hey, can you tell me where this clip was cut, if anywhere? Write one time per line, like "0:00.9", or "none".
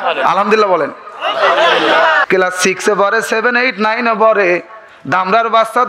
0:02.2